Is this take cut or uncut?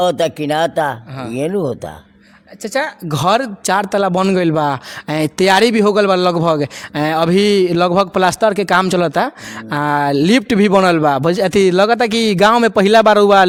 uncut